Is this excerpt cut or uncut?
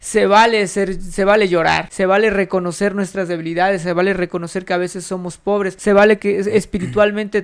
cut